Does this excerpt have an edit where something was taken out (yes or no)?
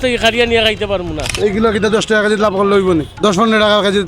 yes